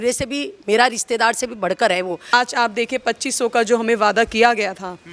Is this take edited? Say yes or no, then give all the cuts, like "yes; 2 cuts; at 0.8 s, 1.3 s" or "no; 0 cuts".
yes; 1 cut; at 2.2 s